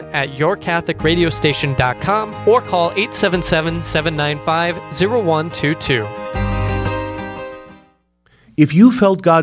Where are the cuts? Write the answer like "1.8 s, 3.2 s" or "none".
8.2 s